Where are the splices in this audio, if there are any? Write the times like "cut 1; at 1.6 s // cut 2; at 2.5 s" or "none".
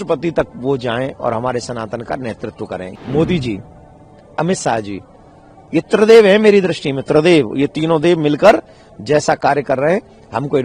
cut 1; at 2.9 s